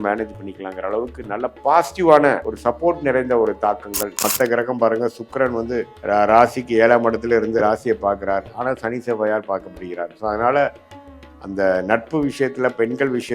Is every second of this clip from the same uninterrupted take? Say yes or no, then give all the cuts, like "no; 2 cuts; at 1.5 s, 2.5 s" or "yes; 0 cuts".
no; 3 cuts; at 2.5 s, 4.2 s, 5.9 s